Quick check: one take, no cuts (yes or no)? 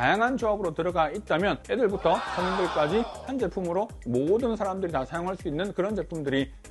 yes